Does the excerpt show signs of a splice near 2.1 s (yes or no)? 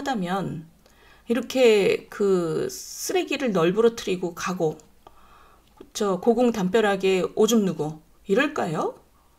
no